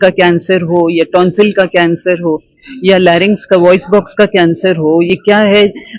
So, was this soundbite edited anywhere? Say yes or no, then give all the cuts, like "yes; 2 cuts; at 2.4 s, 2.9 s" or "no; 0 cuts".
no; 0 cuts